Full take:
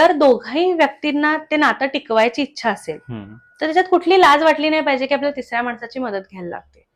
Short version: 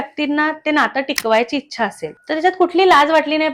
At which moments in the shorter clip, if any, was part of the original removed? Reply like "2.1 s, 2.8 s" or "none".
2.1 s